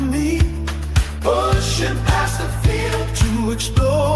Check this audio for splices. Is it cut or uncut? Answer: uncut